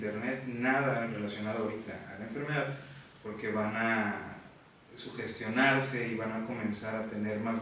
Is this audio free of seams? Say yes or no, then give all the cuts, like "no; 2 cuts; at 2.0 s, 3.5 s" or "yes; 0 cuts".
yes; 0 cuts